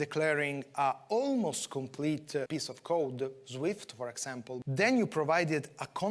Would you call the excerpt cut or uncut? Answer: cut